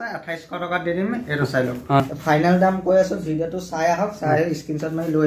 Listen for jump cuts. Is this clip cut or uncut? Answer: cut